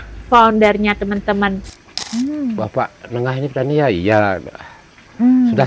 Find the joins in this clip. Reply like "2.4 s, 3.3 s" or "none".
1.6 s